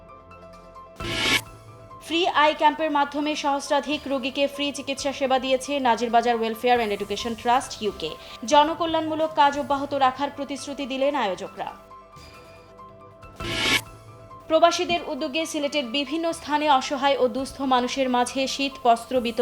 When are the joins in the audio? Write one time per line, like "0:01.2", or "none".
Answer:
0:00.9